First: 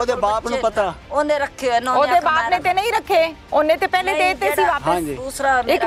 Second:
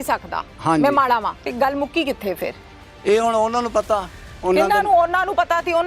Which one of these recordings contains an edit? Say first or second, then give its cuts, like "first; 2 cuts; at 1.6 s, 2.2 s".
second; 1 cut; at 1.4 s